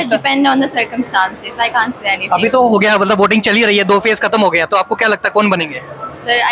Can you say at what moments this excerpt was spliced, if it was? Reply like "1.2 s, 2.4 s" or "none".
none

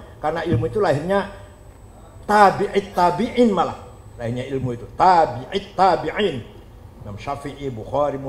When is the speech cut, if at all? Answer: none

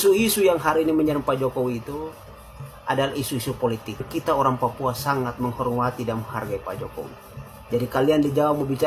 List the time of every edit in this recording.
4.1 s

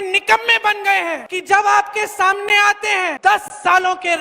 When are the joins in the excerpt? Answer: 1.3 s, 3.2 s

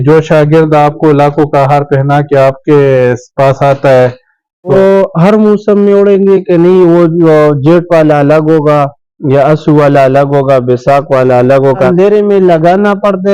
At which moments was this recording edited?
4.7 s, 11.9 s

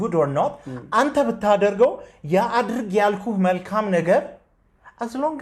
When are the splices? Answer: none

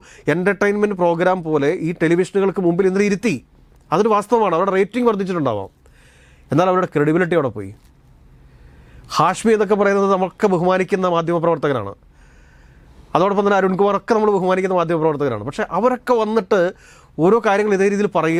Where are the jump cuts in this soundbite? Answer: none

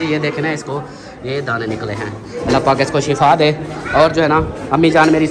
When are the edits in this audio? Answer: none

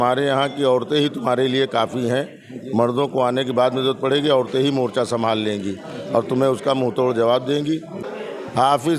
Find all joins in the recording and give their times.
8.0 s

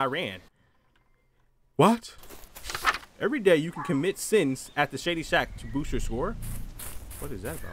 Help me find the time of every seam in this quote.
none

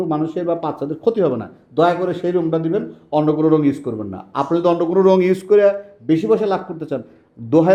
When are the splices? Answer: none

